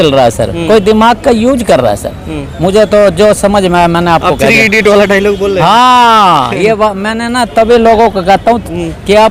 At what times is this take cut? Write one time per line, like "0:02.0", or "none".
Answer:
none